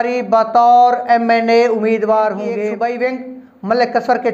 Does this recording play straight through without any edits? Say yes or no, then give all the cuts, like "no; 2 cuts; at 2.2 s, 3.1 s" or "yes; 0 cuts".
no; 1 cut; at 2.6 s